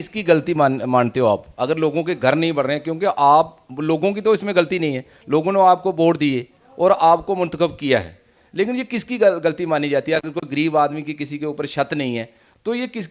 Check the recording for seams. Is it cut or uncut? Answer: uncut